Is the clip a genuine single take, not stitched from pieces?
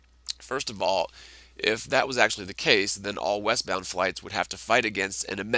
no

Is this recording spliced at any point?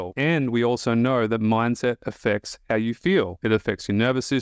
yes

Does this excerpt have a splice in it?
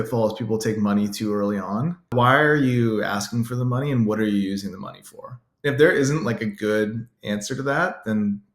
yes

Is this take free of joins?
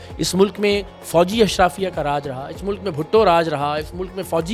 yes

